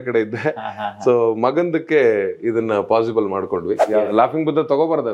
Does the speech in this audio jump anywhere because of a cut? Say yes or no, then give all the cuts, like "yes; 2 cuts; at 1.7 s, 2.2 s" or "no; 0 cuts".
yes; 1 cut; at 3.8 s